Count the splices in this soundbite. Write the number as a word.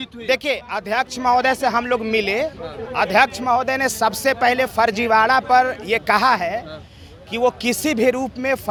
zero